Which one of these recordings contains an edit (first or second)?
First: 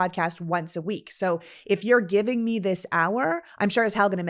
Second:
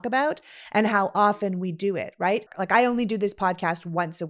second